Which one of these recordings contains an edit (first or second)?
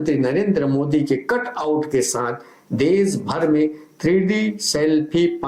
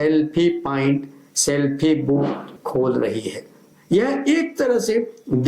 second